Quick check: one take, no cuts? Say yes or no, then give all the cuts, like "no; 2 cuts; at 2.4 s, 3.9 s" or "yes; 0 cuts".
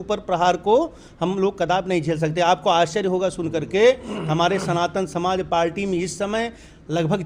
yes; 0 cuts